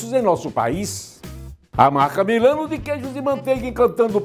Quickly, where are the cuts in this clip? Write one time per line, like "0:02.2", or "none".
0:01.2